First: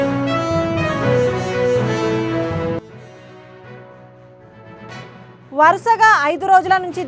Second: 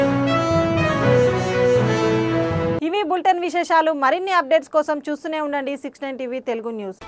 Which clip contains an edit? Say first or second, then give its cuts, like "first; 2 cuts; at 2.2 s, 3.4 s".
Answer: first; 1 cut; at 2.7 s